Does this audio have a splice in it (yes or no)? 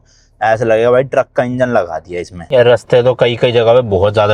yes